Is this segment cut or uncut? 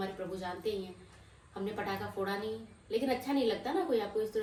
uncut